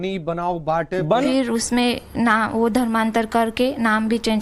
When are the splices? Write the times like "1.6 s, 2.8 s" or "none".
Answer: 1.2 s